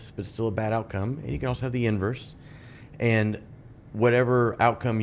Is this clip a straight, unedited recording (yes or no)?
yes